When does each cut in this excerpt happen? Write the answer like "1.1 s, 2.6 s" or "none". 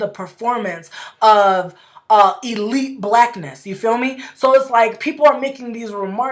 none